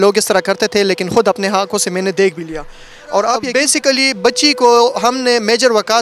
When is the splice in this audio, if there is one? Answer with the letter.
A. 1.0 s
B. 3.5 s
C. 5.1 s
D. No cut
B